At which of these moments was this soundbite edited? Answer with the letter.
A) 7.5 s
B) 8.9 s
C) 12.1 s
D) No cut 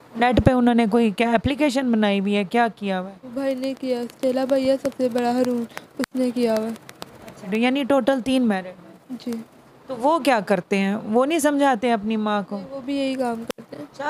A